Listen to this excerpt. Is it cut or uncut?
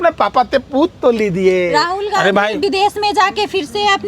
uncut